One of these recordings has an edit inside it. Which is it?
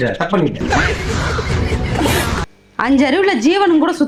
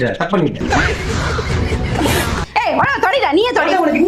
second; 1 cut; at 2.4 s

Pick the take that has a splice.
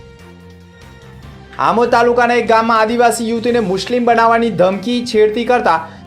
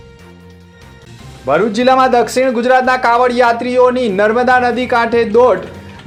first; 1 cut; at 1.0 s

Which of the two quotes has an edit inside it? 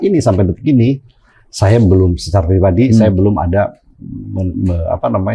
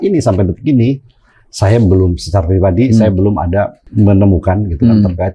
second; 1 cut; at 3.8 s

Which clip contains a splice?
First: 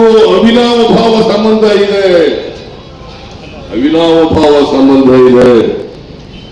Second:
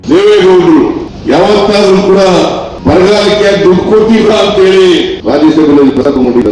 second; 3 cuts; at 1.1 s, 2.7 s, 5.2 s

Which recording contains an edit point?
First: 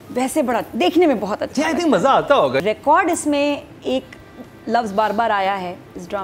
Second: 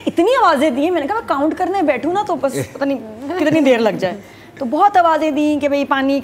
first; 1 cut; at 2.6 s

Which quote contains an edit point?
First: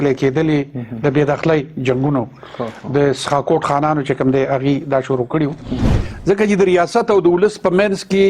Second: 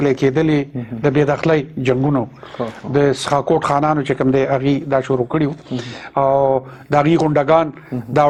first; 1 cut; at 6.0 s

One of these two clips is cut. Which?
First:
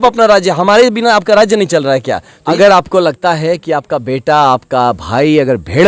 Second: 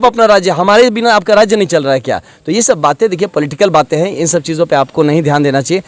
first; 1 cut; at 2.5 s

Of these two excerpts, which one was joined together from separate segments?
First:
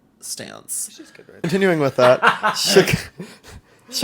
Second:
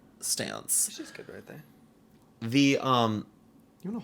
first; 1 cut; at 1.4 s

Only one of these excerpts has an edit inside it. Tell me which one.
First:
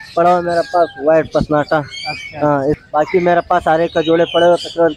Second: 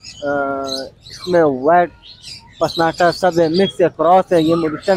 first; 1 cut; at 2.8 s

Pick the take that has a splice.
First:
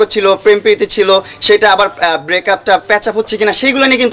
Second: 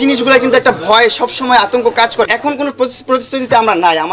second; 1 cut; at 2.2 s

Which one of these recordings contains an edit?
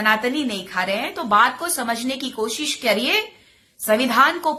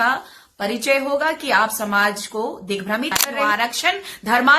second; 1 cut; at 3.1 s

